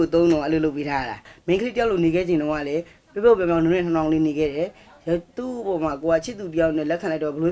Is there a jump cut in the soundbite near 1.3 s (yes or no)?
yes